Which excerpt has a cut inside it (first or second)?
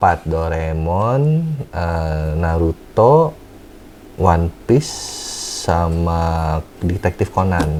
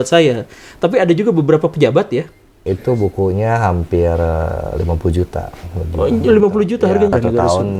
second